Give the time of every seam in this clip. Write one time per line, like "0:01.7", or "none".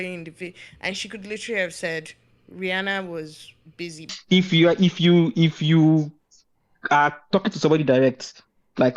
0:04.1